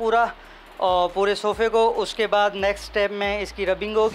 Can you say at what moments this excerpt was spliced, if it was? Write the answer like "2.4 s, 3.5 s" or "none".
none